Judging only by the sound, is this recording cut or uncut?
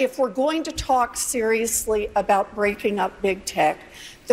uncut